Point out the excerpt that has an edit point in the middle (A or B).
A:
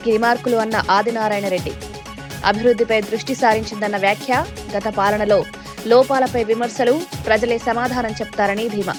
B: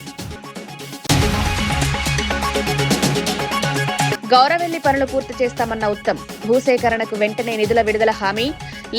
B